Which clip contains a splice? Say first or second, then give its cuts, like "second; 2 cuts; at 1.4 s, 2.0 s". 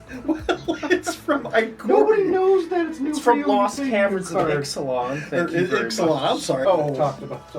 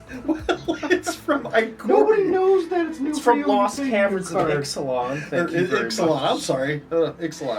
first; 1 cut; at 6.6 s